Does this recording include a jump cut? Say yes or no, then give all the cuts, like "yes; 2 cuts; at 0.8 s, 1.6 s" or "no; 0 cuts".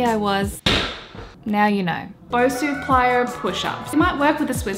yes; 3 cuts; at 1.3 s, 2.3 s, 3.9 s